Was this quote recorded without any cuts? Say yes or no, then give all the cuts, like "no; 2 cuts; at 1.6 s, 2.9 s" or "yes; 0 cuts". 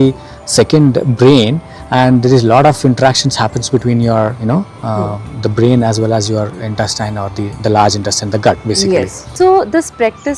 no; 1 cut; at 9.2 s